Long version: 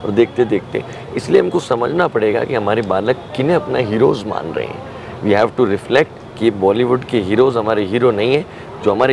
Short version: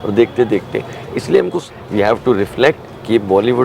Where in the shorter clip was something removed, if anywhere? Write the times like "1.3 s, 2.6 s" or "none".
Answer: 1.6 s